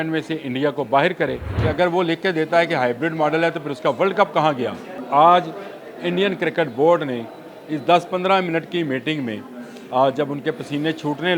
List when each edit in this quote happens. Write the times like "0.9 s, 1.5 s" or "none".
1.5 s, 5.0 s